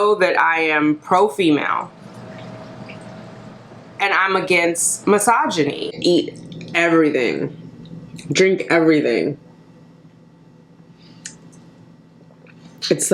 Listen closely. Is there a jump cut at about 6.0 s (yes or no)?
yes